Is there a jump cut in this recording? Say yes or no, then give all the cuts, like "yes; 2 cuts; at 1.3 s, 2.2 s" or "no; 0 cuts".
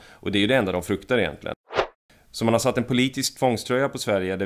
yes; 1 cut; at 1.6 s